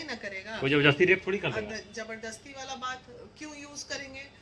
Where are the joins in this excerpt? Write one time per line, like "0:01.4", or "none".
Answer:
none